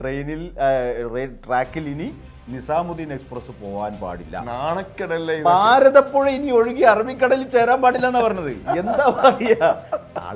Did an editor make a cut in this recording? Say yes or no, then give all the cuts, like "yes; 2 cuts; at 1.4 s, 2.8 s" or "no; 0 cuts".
no; 0 cuts